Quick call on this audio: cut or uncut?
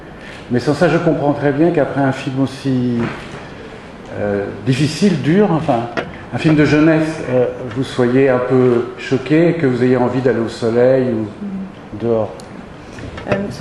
uncut